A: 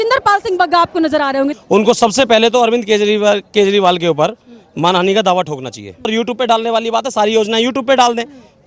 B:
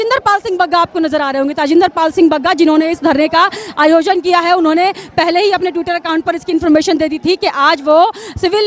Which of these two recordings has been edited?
A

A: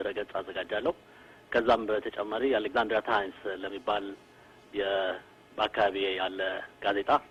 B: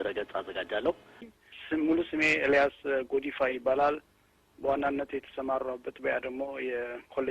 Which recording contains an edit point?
B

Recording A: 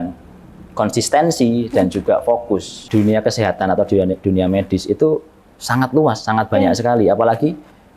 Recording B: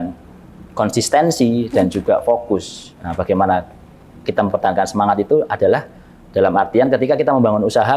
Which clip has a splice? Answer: A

